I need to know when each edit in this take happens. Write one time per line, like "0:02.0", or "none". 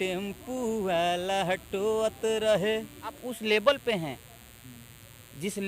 0:03.3